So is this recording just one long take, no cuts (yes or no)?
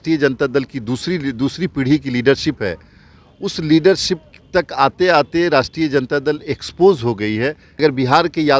no